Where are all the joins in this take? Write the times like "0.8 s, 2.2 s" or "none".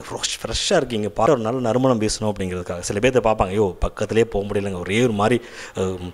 1.3 s